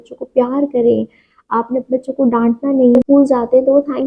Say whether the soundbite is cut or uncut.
cut